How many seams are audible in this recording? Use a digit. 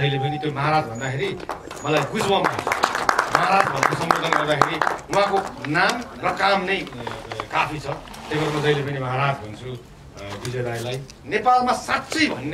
1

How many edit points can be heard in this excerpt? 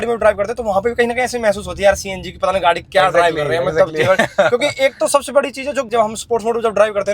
1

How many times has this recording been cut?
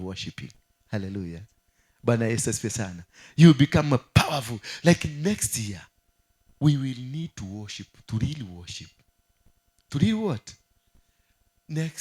0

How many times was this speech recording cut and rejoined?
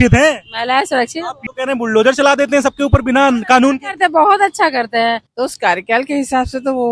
2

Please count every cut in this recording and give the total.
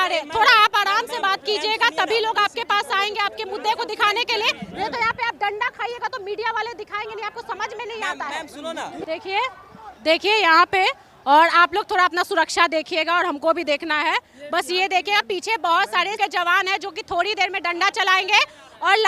2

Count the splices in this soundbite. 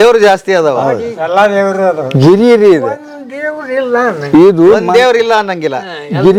0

